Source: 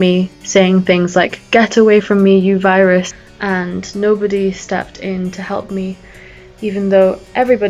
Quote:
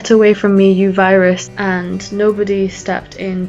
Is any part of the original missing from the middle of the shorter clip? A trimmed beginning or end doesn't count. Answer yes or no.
yes